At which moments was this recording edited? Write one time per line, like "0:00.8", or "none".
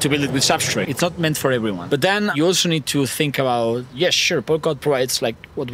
0:00.9
0:01.8